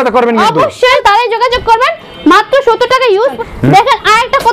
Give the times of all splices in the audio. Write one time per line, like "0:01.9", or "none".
0:01.0
0:03.4